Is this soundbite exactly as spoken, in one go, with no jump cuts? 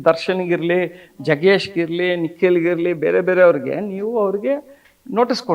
yes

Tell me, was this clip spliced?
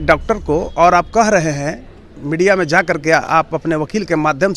no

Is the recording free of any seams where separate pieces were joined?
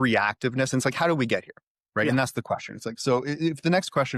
yes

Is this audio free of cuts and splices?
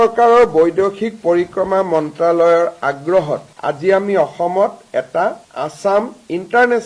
yes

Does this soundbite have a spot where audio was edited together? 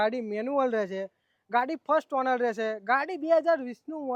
no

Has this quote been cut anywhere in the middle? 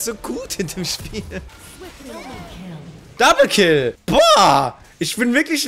yes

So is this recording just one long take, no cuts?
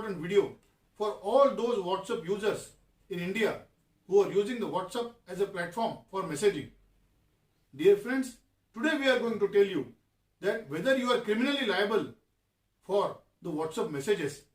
no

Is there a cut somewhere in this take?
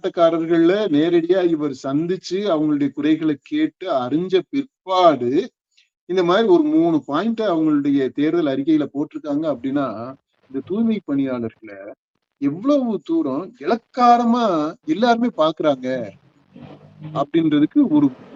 no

